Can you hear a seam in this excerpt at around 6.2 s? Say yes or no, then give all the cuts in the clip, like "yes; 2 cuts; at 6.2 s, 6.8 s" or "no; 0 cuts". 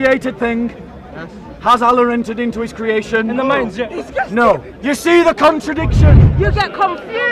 yes; 1 cut; at 6.2 s